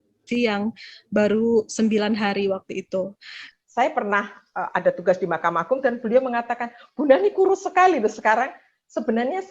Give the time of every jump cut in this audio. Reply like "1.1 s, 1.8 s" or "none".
3.4 s